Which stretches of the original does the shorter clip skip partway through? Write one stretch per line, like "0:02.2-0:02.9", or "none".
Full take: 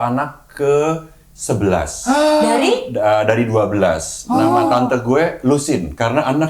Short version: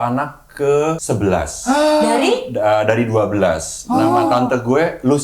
0:01.0-0:01.4